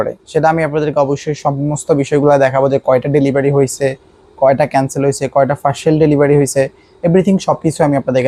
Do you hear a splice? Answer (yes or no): no